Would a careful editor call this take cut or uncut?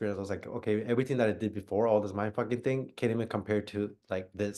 uncut